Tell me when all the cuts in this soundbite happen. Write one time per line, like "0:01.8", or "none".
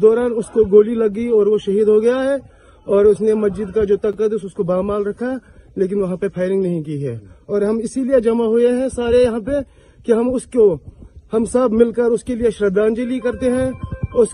none

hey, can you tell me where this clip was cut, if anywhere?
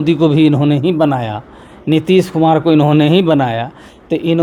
none

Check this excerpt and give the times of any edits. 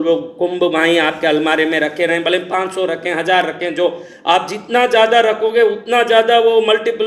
none

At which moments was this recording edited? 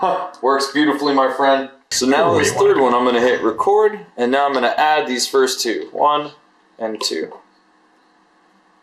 0:01.8

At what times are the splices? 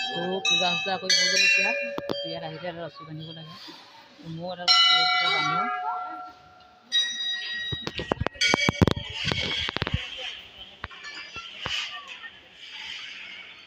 none

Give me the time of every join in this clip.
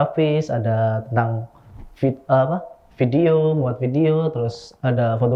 none

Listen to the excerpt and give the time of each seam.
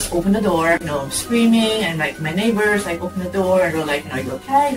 none

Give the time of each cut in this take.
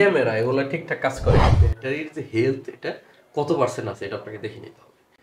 0:01.5

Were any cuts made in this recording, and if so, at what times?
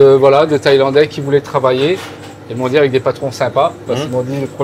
none

